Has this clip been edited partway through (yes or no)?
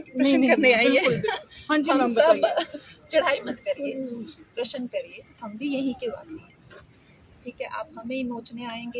no